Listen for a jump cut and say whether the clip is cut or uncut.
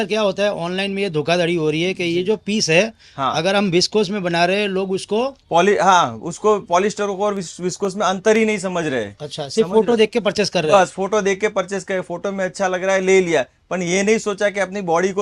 uncut